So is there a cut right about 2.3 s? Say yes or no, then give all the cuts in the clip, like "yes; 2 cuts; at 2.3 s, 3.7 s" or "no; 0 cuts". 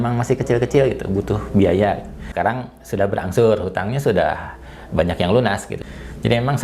yes; 2 cuts; at 2.3 s, 5.7 s